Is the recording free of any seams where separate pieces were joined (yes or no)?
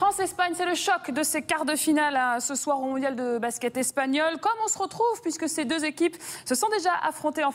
no